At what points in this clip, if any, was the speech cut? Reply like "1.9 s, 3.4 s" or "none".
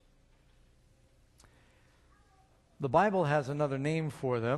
3.5 s